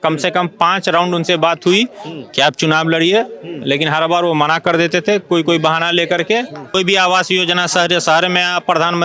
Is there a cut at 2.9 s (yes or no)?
no